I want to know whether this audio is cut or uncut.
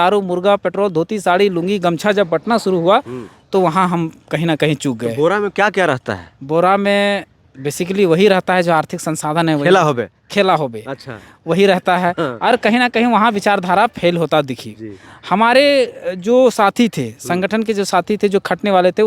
uncut